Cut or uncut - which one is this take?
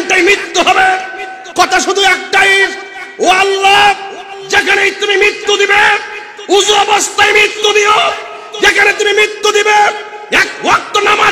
uncut